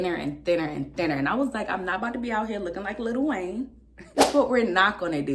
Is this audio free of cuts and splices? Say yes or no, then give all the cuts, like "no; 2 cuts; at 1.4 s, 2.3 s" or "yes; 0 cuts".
no; 1 cut; at 4.2 s